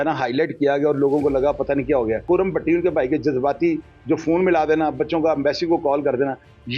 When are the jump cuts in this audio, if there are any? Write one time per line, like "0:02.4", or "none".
0:02.2